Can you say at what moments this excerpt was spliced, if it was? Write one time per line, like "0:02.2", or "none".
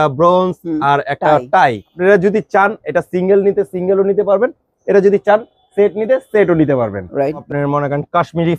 0:01.9
0:07.4